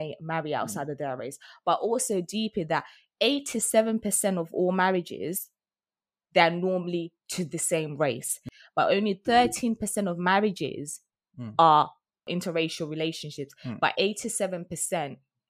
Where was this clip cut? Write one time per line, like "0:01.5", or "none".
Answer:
0:08.5